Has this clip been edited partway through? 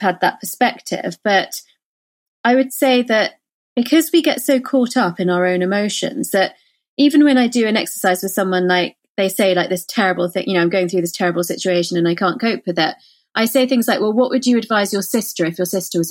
no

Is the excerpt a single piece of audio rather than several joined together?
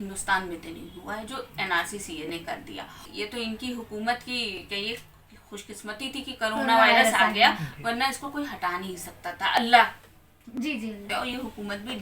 no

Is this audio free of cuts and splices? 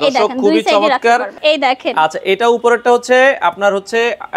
no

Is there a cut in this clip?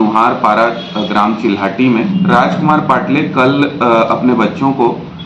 yes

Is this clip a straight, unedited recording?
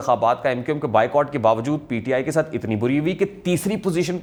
yes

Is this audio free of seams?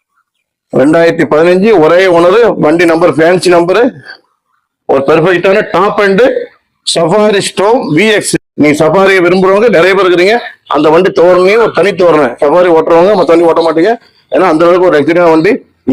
yes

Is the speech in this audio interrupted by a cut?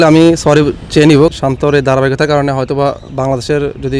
yes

